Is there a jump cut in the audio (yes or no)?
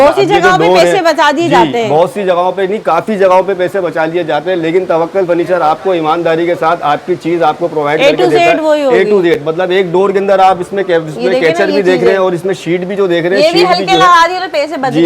no